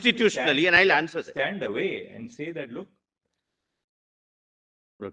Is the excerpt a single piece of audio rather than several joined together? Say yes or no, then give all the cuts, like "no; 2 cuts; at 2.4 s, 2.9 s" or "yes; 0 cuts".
yes; 0 cuts